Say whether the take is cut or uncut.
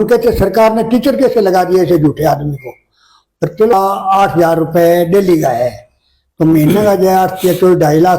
cut